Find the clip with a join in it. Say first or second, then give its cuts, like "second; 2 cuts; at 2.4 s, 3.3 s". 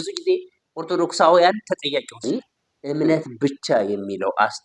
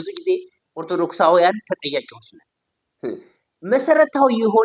first; 1 cut; at 2.2 s